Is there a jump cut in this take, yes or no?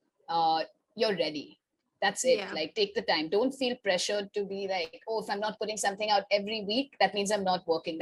no